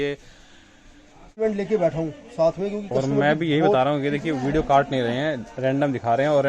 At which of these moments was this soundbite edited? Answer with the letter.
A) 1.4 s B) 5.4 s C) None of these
A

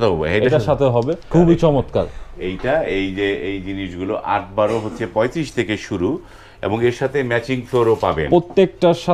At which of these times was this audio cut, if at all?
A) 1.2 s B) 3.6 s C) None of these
A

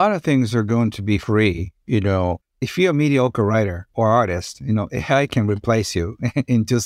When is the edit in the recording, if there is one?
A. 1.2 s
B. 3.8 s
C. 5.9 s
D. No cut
A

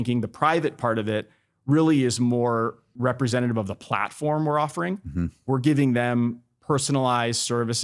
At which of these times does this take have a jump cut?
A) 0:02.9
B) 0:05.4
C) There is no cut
A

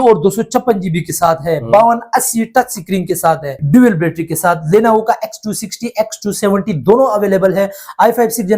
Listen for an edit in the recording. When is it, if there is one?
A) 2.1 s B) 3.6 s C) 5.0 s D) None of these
B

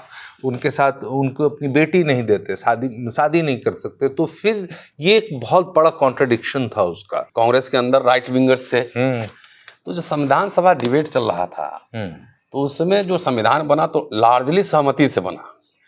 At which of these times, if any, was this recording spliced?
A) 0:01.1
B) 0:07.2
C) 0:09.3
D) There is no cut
B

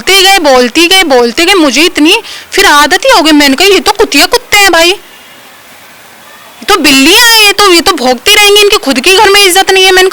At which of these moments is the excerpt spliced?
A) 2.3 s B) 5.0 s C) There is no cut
C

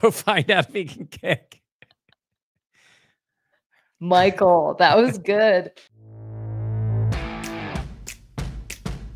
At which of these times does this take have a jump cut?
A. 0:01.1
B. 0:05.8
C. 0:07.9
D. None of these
B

